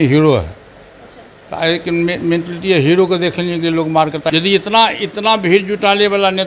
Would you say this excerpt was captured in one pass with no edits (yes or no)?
no